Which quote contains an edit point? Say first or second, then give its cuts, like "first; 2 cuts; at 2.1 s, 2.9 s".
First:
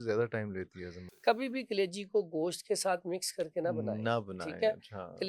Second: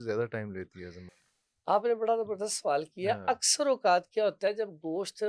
first; 1 cut; at 1.1 s